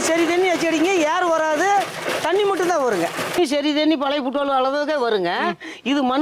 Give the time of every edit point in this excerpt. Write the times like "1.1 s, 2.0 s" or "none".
3.4 s